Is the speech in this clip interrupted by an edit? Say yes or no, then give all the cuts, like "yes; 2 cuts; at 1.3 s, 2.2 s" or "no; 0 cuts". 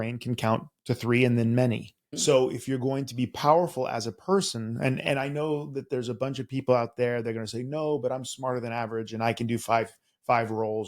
yes; 1 cut; at 2.1 s